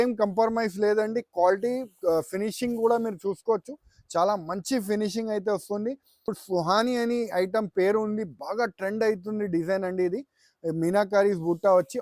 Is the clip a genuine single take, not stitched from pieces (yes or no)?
no